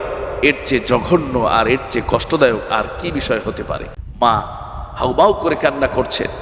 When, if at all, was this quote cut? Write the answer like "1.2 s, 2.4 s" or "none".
4.0 s